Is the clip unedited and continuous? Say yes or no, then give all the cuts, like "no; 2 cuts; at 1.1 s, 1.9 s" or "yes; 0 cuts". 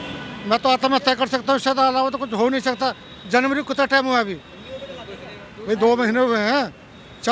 yes; 0 cuts